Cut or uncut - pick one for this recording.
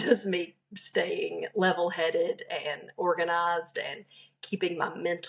uncut